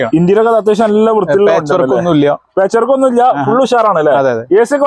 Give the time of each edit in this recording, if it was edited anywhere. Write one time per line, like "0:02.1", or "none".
none

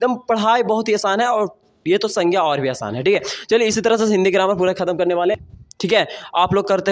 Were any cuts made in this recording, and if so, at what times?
0:05.4

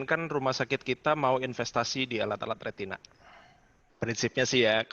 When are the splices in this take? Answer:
0:03.8

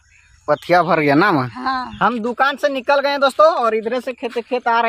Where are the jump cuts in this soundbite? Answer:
0:01.9

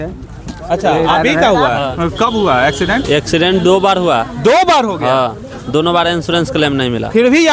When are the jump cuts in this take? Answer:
0:01.9

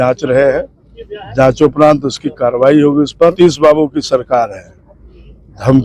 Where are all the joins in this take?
0:03.3

